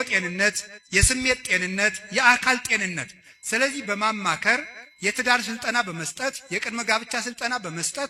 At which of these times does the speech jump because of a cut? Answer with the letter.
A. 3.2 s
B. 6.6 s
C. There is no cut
C